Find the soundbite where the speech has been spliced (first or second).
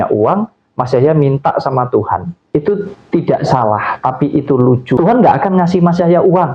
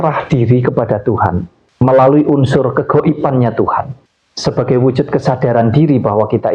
first